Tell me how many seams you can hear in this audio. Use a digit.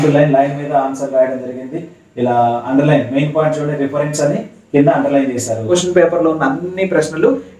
1